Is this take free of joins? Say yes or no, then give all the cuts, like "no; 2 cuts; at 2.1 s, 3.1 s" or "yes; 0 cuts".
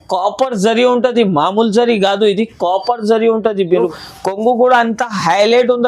no; 1 cut; at 4.0 s